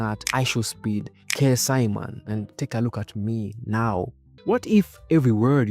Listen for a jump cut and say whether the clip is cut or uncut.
cut